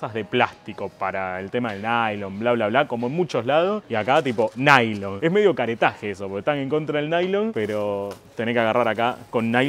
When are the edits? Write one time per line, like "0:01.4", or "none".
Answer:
0:05.2